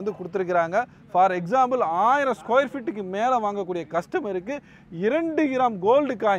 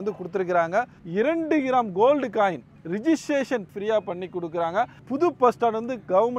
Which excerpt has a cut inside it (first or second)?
second